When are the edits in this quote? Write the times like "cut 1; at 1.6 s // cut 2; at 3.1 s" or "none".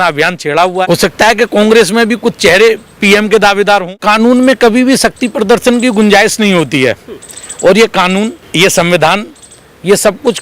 cut 1; at 0.8 s // cut 2; at 4.0 s // cut 3; at 8.4 s